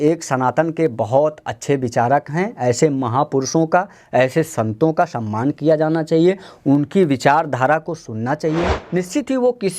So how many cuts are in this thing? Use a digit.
1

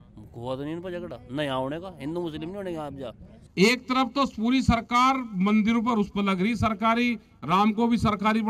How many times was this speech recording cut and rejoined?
1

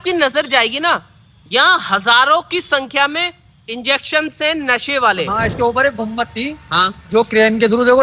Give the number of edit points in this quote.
1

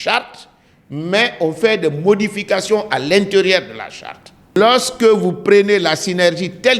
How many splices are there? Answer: 1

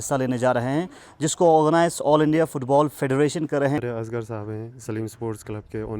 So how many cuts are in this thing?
1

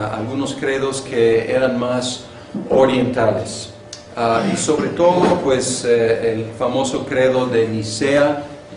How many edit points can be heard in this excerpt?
0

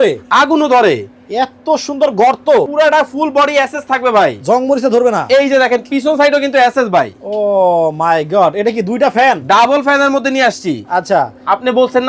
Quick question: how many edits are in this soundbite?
1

